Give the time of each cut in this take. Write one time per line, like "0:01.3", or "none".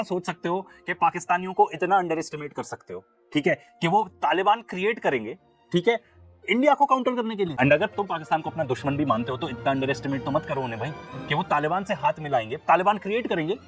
0:07.5